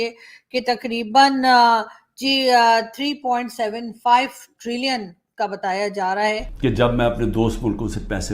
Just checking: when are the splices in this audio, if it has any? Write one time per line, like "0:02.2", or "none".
0:06.5